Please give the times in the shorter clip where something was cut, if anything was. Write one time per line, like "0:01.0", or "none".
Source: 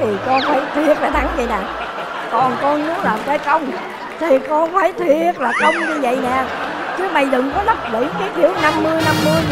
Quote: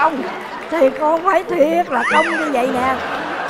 none